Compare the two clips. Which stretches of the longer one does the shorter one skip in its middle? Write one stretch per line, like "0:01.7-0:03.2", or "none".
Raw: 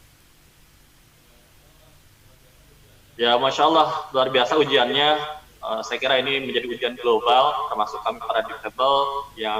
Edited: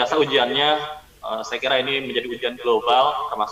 none